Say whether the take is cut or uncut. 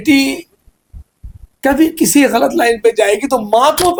uncut